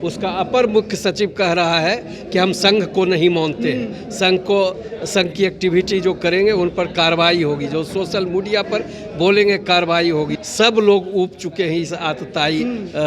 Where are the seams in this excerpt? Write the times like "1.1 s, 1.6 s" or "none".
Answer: 10.4 s